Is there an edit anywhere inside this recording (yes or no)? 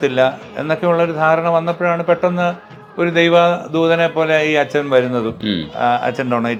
no